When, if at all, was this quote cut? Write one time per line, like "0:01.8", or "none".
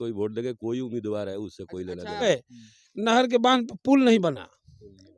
0:02.2